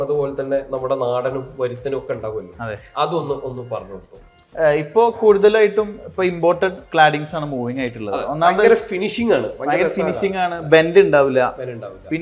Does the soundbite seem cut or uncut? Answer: uncut